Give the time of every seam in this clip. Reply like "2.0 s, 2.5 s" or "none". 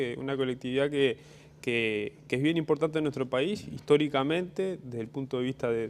2.9 s